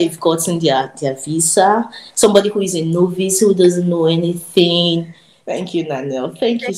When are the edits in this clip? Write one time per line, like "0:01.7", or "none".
0:05.0